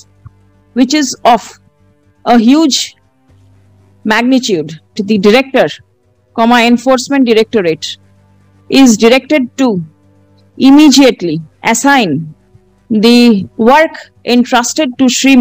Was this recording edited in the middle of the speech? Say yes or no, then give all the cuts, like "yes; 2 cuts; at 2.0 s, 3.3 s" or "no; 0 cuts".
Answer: yes; 3 cuts; at 5.0 s, 11.5 s, 13.5 s